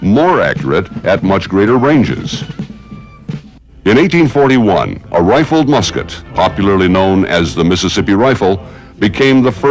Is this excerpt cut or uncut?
uncut